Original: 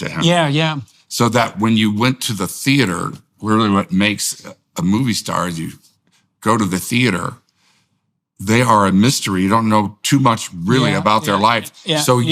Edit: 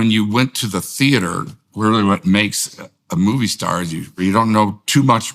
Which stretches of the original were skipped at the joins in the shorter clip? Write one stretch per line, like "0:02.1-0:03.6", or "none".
0:05.8-0:09.3